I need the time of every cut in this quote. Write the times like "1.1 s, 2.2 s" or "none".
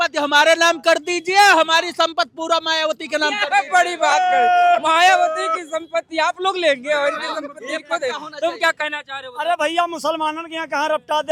none